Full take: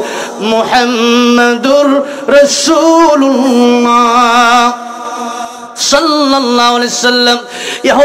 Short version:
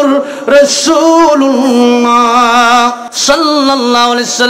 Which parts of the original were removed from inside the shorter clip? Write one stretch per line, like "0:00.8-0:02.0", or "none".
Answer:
0:04.9-0:05.7